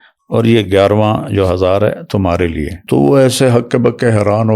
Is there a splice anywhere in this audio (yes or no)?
yes